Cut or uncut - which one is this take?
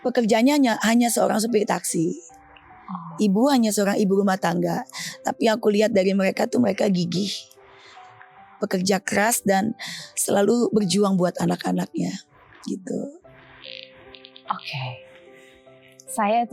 uncut